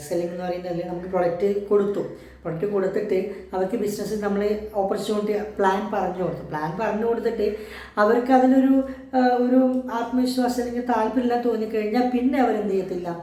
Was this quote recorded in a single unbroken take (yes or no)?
yes